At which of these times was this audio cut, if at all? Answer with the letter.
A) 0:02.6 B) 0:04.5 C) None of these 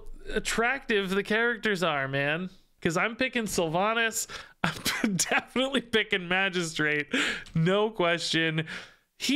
A